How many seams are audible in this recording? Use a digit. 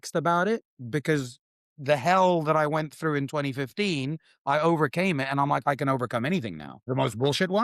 1